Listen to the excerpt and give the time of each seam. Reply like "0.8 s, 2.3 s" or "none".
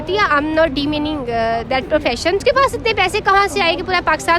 2.4 s